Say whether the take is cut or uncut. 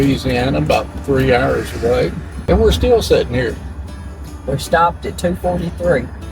cut